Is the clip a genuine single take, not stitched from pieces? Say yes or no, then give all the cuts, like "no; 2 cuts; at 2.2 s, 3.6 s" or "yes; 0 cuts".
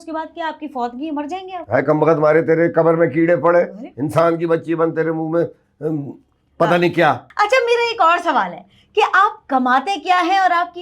no; 1 cut; at 7.3 s